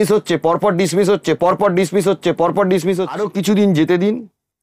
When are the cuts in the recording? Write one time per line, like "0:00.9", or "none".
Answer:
0:03.2